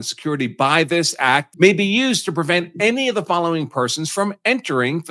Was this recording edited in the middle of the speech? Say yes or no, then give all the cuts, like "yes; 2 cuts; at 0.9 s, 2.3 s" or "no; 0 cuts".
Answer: yes; 1 cut; at 1.5 s